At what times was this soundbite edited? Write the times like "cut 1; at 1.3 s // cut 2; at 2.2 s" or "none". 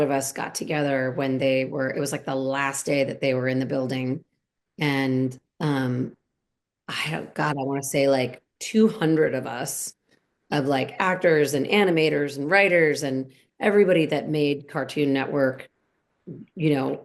none

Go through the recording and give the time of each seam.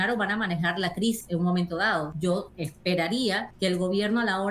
cut 1; at 1.2 s // cut 2; at 2.4 s // cut 3; at 3.5 s

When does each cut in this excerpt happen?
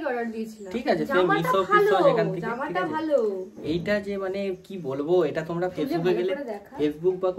none

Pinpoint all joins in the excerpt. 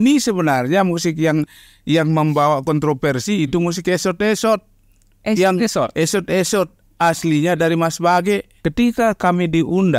cut 1; at 8.5 s

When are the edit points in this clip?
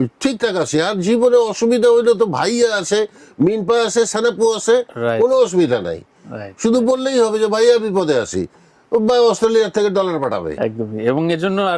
none

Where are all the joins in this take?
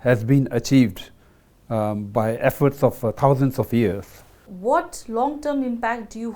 cut 1; at 4.5 s

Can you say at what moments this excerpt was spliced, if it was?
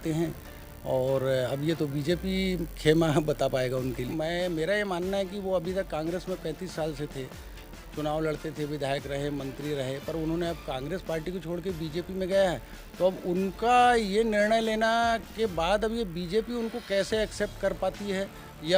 cut 1; at 4.0 s

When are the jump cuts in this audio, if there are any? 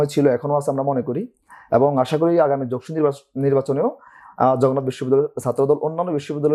none

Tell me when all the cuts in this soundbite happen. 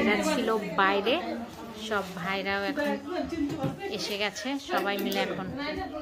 none

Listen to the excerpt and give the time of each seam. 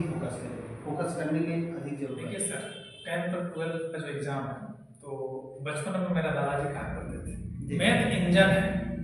cut 1; at 2.2 s // cut 2; at 7.5 s

